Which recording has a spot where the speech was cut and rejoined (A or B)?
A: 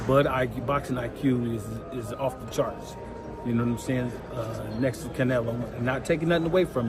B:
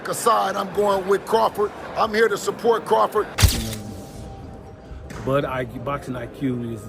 B